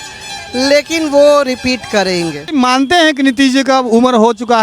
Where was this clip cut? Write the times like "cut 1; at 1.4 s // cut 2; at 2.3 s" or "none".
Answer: cut 1; at 2.4 s